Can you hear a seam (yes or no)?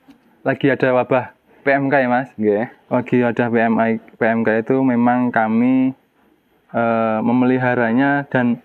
no